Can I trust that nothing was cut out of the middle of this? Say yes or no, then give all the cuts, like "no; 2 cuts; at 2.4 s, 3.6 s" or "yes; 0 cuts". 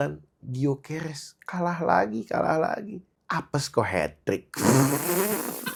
yes; 0 cuts